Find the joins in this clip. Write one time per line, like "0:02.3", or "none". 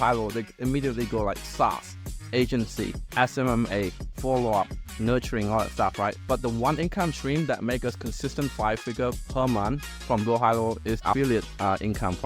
0:06.2
0:10.0
0:11.0